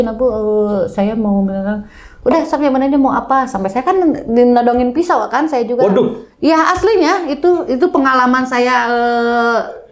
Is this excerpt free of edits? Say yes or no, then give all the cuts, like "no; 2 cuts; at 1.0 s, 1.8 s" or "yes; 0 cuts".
yes; 0 cuts